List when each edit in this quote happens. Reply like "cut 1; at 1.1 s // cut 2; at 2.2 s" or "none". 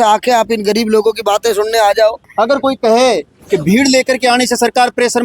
cut 1; at 2.2 s